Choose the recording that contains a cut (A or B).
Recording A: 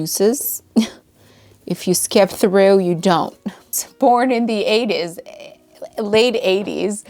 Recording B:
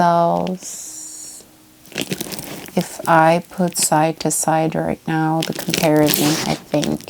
A